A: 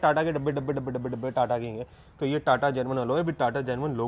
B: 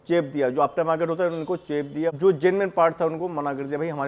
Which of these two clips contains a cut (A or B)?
B